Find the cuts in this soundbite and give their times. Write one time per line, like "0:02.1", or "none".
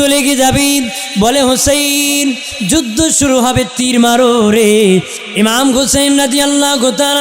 0:05.2